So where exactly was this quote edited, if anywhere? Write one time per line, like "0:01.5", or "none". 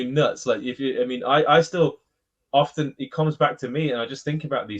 none